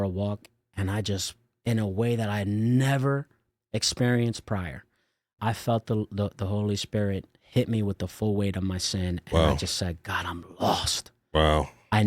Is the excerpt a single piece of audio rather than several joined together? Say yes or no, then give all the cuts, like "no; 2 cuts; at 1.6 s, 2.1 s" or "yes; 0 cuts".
no; 1 cut; at 5.4 s